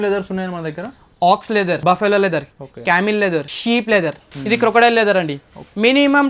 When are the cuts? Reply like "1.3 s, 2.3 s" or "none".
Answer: 1.8 s, 3.5 s, 4.3 s